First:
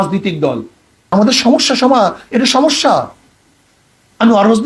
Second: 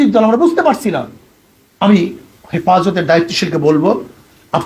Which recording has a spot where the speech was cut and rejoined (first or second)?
first